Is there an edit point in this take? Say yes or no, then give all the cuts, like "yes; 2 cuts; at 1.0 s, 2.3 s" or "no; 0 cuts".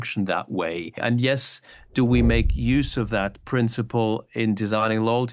yes; 1 cut; at 1.0 s